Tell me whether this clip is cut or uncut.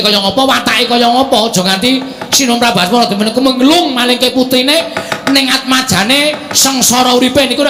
uncut